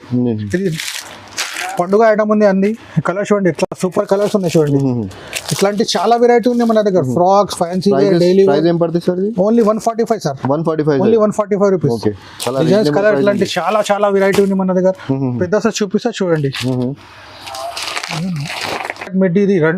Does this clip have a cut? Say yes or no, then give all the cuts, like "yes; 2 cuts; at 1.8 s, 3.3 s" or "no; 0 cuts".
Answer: no; 0 cuts